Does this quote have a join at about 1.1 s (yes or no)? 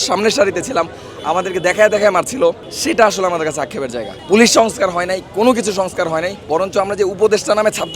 no